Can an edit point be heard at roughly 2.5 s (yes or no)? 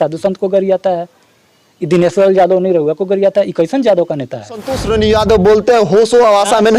no